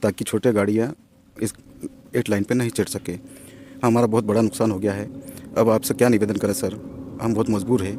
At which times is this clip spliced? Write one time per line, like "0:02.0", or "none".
none